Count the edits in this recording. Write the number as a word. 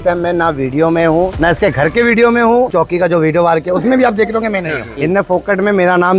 two